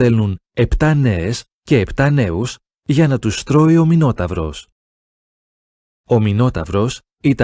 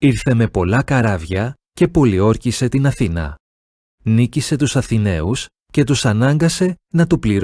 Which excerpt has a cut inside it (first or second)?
first